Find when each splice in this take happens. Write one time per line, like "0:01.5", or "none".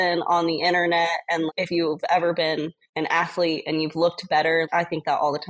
0:02.8